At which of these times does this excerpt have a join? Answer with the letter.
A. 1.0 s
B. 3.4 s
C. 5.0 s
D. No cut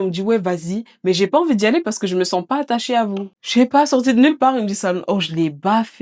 B